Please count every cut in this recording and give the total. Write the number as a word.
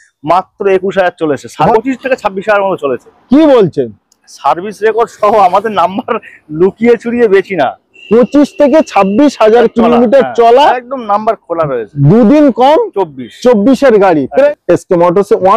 two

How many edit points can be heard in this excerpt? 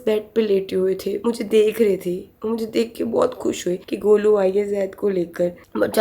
zero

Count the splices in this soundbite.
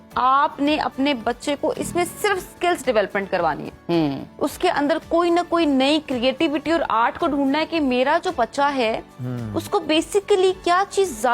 zero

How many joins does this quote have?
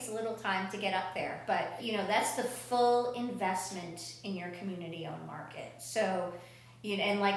one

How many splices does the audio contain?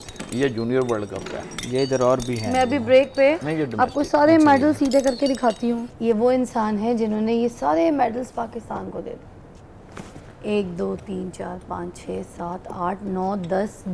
zero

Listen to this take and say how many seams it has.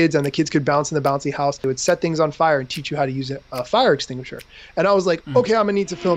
one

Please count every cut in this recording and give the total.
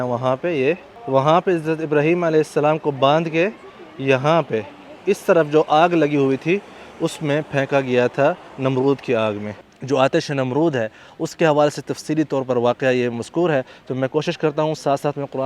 two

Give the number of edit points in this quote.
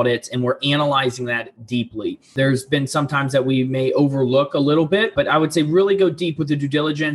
two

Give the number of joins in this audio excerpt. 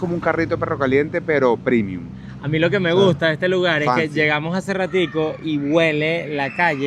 zero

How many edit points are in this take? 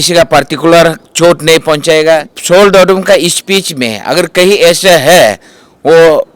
one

